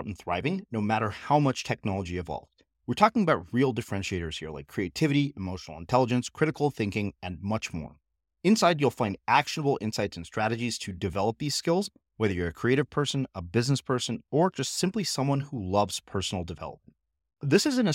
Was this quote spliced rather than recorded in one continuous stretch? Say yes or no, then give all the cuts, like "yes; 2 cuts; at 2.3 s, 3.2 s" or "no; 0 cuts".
no; 0 cuts